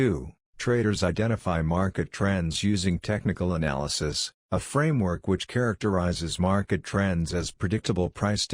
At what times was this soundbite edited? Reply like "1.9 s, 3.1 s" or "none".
0.9 s